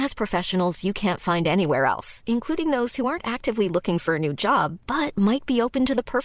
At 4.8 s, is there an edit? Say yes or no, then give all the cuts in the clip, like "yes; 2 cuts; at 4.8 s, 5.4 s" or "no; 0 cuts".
no; 0 cuts